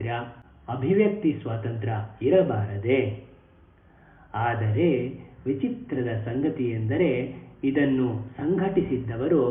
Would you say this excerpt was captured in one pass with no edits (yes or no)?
yes